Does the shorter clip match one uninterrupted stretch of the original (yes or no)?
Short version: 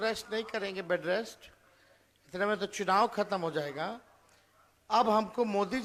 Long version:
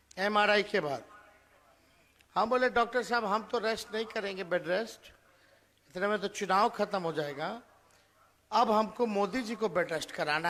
yes